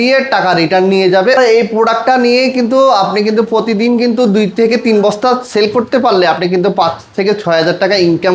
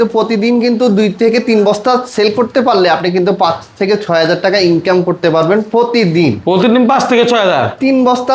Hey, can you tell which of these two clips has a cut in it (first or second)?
first